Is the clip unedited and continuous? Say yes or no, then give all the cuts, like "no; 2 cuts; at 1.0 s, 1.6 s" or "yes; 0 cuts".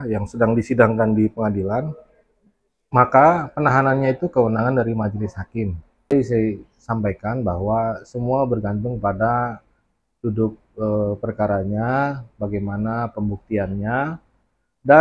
no; 1 cut; at 6.1 s